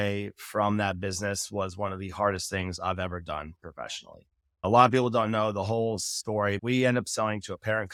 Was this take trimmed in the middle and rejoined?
no; 0 cuts

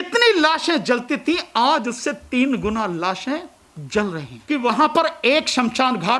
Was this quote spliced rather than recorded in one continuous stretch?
yes; 1 cut; at 4.3 s

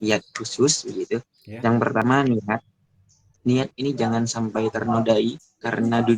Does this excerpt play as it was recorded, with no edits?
no; 1 cut; at 2.0 s

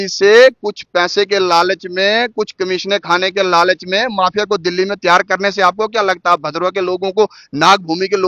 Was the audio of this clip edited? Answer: no; 0 cuts

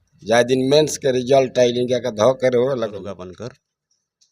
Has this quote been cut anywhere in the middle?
yes; 1 cut; at 3.0 s

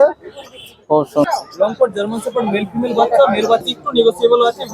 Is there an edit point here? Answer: yes; 2 cuts; at 1.2 s, 3.7 s

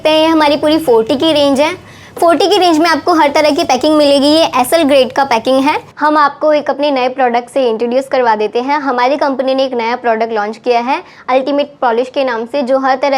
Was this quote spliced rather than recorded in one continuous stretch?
yes; 1 cut; at 5.9 s

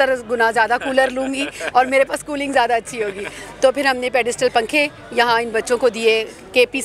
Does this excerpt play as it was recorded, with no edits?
yes; 0 cuts

